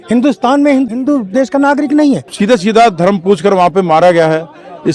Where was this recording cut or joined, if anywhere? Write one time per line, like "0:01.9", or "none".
0:00.9
0:02.3